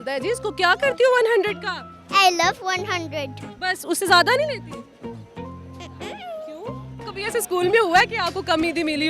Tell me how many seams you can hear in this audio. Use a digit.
1